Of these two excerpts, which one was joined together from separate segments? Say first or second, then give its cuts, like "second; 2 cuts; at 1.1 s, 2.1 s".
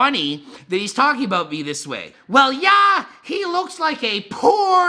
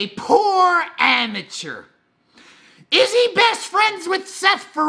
first; 1 cut; at 2.1 s